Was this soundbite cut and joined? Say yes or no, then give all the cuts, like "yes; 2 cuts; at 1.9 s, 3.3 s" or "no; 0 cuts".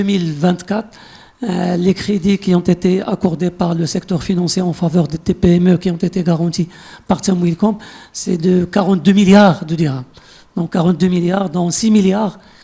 no; 0 cuts